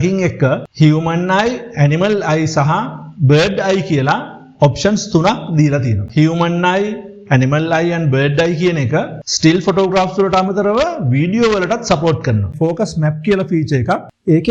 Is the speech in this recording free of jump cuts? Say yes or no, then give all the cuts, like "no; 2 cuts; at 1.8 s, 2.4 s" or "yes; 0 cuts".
no; 2 cuts; at 6.0 s, 12.5 s